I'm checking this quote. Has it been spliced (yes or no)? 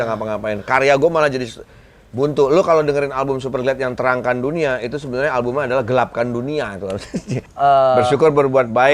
yes